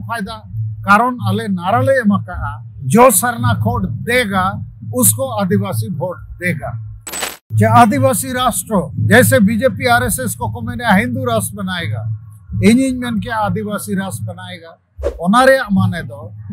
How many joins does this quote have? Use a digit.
1